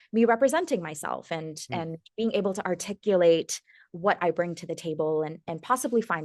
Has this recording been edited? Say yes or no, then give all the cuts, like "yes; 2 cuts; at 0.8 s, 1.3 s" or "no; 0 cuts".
no; 0 cuts